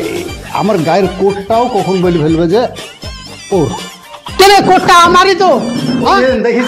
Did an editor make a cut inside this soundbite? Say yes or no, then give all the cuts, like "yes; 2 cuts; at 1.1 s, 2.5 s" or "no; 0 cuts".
no; 0 cuts